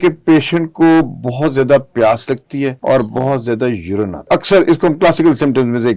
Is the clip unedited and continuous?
no; 2 cuts; at 2.8 s, 4.3 s

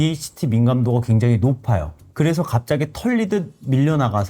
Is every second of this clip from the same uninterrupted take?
yes; 0 cuts

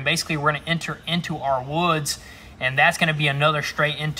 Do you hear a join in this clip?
no; 0 cuts

